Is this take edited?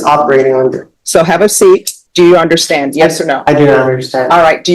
yes; 2 cuts; at 0.9 s, 2.0 s

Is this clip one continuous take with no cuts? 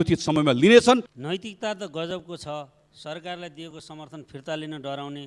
no; 1 cut; at 1.2 s

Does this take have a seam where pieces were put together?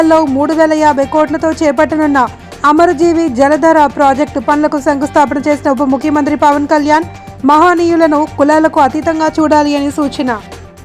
no; 0 cuts

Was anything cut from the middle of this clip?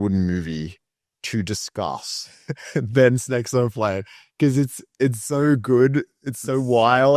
no; 0 cuts

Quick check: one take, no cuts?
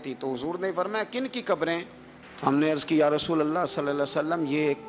yes; 0 cuts

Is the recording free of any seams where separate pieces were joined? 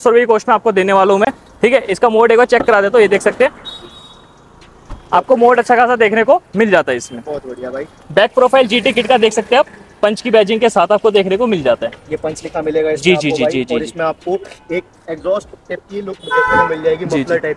yes; 0 cuts

